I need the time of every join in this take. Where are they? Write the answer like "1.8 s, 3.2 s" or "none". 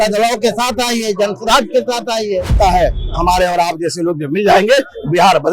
2.6 s